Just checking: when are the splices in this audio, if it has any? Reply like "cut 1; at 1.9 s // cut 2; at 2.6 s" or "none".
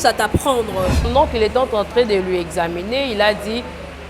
cut 1; at 1.1 s